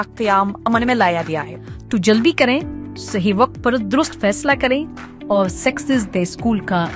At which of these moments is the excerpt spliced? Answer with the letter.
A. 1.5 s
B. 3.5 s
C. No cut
A